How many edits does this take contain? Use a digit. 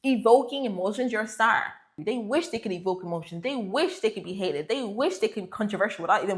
1